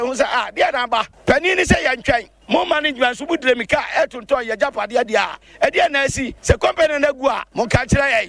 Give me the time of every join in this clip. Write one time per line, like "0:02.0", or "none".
0:01.1
0:02.3
0:05.4
0:06.3
0:07.4